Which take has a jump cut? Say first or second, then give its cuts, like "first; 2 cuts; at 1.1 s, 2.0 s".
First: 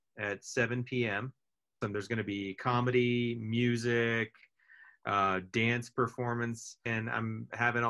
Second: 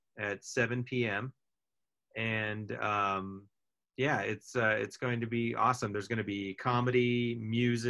first; 2 cuts; at 1.8 s, 6.9 s